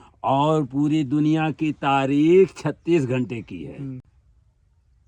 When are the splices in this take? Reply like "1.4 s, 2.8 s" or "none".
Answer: none